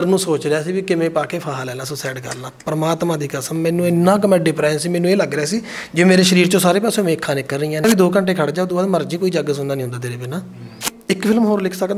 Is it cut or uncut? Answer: cut